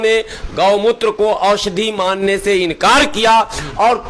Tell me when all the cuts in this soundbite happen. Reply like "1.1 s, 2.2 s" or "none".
none